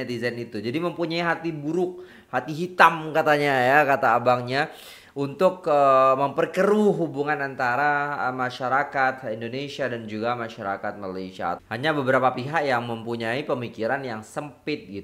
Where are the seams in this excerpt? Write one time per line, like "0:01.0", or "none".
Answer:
0:11.6